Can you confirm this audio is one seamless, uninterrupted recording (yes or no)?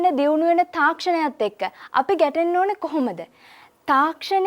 yes